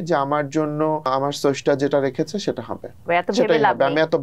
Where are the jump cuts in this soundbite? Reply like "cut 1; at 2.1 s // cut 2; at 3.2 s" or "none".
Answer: cut 1; at 1.1 s // cut 2; at 3.1 s